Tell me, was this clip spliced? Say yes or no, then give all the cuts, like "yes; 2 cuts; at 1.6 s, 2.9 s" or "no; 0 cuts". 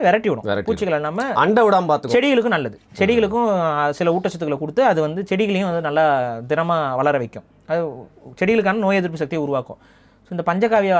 no; 0 cuts